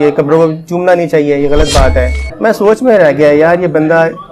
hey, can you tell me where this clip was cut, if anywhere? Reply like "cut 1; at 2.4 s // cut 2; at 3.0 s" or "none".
cut 1; at 2.2 s